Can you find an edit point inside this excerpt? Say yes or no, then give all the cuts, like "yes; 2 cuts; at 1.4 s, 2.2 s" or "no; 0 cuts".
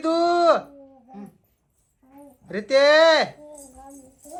no; 0 cuts